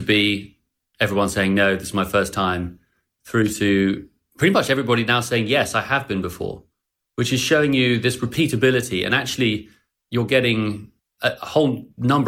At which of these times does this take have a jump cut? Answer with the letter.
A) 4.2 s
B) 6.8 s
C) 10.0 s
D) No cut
D